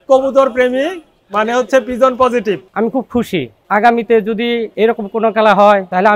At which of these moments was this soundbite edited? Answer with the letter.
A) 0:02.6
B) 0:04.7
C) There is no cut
A